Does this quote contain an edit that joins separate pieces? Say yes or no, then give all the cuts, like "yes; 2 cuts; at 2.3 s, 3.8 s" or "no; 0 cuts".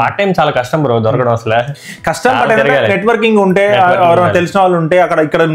no; 0 cuts